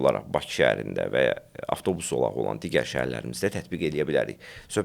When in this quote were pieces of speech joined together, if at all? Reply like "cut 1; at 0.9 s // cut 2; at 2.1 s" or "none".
none